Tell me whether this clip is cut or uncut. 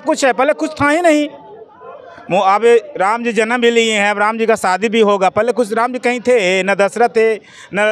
uncut